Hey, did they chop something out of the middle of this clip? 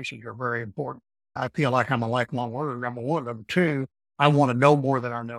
yes; 2 cuts; at 1.4 s, 4.0 s

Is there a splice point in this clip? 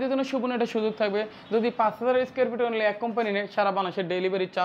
no; 0 cuts

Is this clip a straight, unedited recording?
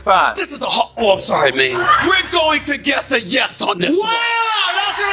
no; 1 cut; at 2.0 s

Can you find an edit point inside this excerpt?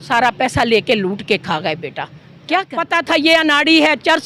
yes; 1 cut; at 2.7 s

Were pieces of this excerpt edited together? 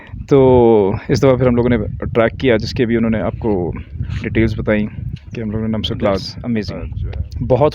yes; 1 cut; at 6.4 s

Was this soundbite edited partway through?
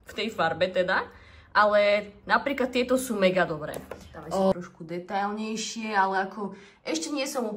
yes; 1 cut; at 4.5 s

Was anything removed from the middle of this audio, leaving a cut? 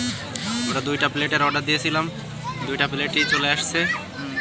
no; 0 cuts

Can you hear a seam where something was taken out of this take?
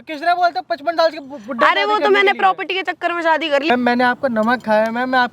yes; 1 cut; at 3.7 s

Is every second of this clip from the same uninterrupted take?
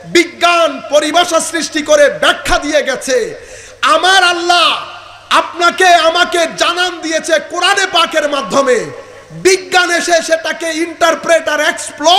yes; 0 cuts

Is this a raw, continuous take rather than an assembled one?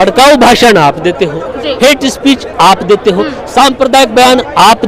yes; 0 cuts

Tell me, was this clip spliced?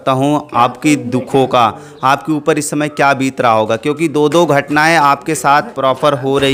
no; 0 cuts

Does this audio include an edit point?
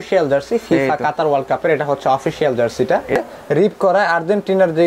yes; 1 cut; at 3.2 s

